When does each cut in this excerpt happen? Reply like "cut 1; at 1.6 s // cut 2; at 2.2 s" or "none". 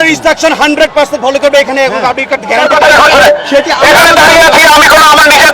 cut 1; at 2.6 s